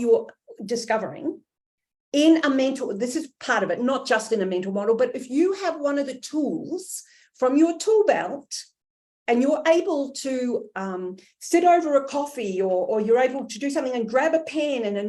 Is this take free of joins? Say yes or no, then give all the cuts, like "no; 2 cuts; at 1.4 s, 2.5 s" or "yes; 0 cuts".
yes; 0 cuts